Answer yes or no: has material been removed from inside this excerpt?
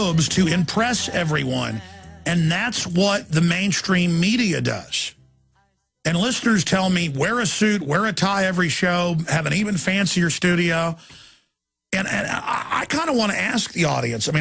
yes